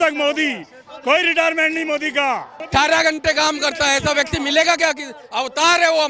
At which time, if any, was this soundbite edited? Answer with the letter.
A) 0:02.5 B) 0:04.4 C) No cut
A